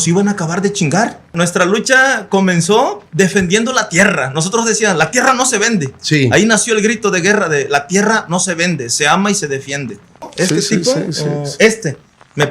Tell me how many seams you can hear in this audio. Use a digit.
2